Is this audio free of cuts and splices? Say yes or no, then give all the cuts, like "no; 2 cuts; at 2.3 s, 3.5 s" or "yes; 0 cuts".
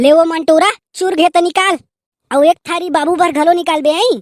yes; 0 cuts